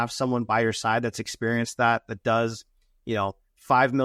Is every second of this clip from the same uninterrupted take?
yes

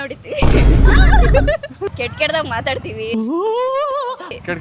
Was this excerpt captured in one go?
no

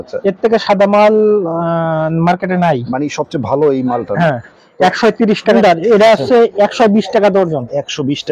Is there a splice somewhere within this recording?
yes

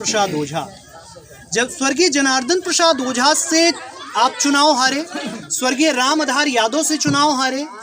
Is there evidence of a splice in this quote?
no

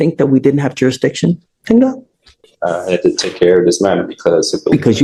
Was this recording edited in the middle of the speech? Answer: no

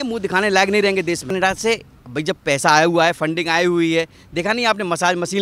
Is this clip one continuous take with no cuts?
no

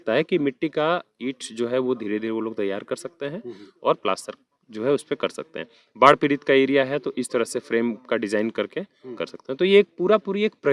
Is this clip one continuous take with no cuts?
yes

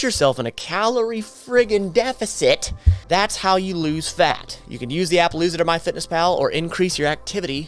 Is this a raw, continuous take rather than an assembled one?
yes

